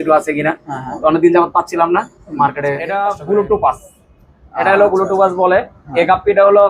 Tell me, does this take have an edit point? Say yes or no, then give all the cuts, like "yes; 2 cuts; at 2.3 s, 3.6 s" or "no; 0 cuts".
yes; 1 cut; at 2.9 s